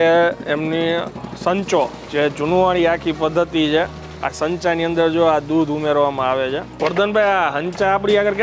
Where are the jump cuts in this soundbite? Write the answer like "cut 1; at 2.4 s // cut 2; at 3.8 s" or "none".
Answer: cut 1; at 2.0 s // cut 2; at 6.7 s